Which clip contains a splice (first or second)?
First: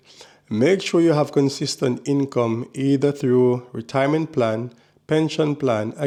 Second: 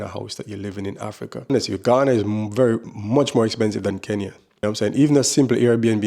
second